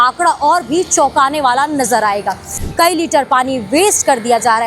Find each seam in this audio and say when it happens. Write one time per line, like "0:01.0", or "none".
0:02.5